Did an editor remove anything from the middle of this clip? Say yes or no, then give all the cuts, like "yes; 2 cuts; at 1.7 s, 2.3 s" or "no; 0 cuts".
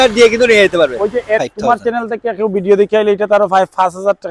yes; 1 cut; at 1.5 s